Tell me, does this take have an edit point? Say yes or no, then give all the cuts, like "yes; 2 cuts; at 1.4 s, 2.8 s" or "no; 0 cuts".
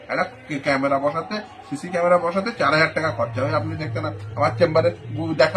no; 0 cuts